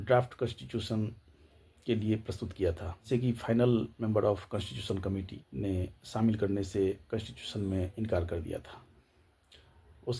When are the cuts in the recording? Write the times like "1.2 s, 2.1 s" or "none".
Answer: 2.9 s, 5.4 s